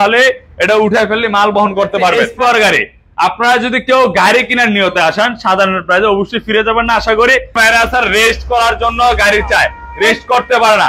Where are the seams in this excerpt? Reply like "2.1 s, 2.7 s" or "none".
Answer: 2.3 s, 7.5 s